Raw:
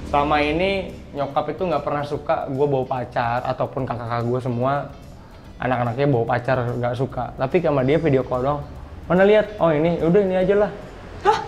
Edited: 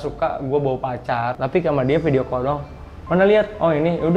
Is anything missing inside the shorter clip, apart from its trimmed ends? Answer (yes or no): yes